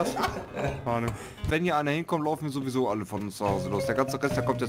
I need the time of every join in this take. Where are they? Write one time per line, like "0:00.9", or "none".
0:01.5